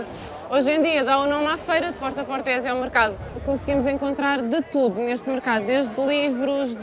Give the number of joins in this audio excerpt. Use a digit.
1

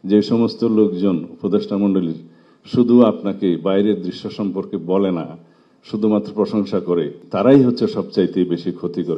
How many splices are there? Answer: 1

